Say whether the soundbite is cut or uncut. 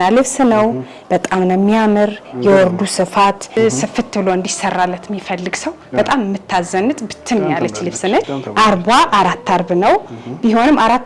cut